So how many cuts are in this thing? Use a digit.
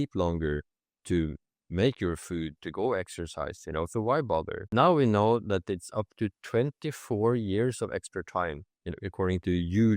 1